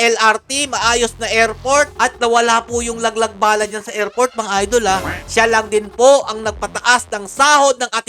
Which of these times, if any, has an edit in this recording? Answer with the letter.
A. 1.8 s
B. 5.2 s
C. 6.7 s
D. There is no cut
B